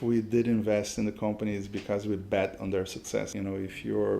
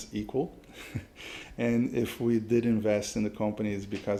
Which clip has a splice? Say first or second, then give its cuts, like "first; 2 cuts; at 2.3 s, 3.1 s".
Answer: first; 1 cut; at 3.3 s